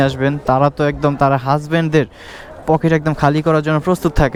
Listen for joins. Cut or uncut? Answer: uncut